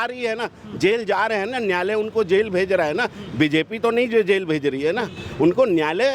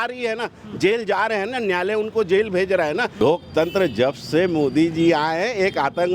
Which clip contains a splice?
second; 1 cut; at 3.2 s

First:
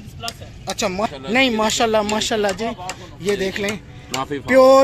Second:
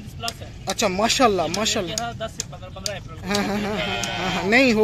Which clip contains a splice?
first; 1 cut; at 1.1 s

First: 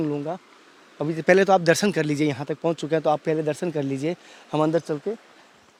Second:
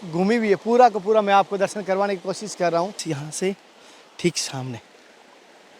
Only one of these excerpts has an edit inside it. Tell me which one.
second; 1 cut; at 3.0 s

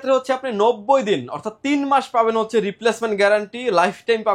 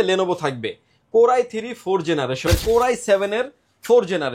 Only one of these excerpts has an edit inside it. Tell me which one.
second; 1 cut; at 2.4 s

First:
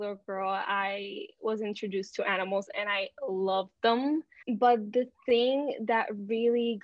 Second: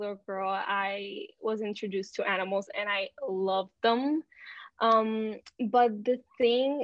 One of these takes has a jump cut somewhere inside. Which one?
first; 1 cut; at 4.4 s

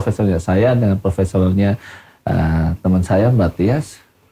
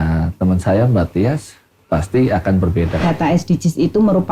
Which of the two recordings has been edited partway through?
second; 1 cut; at 3.0 s

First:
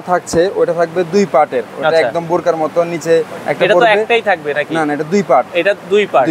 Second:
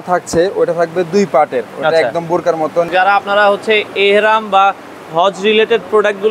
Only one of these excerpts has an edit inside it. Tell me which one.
second; 1 cut; at 2.9 s

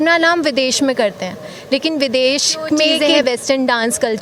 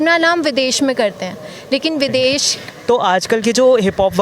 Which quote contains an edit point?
second; 1 cut; at 2.5 s

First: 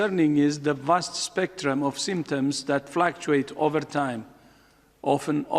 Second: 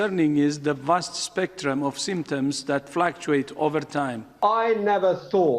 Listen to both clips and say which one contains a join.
second; 1 cut; at 4.2 s

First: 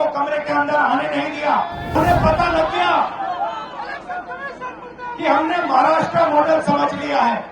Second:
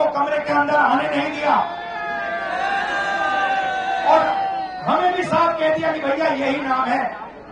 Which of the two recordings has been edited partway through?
first; 1 cut; at 2.0 s

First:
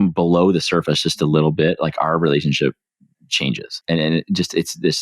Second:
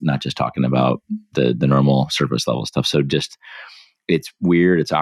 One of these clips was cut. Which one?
first; 1 cut; at 3.8 s

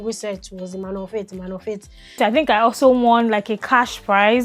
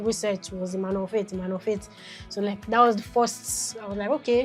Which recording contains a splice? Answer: first; 1 cut; at 2.2 s

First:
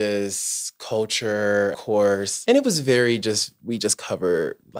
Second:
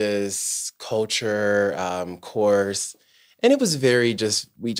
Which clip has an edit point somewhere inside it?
first; 1 cut; at 1.8 s

